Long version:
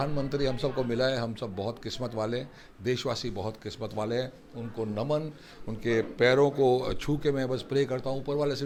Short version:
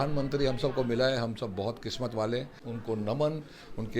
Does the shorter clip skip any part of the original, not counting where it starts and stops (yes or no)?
yes